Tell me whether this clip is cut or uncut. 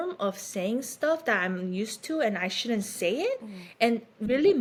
uncut